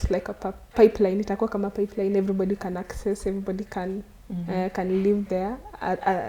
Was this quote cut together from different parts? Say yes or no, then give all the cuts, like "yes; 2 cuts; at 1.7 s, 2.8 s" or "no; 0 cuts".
no; 0 cuts